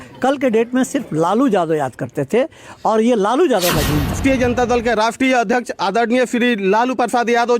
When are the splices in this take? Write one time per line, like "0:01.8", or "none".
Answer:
0:04.2